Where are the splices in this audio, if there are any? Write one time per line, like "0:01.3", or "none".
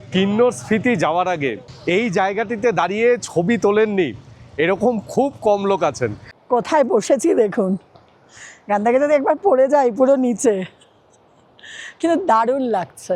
0:06.3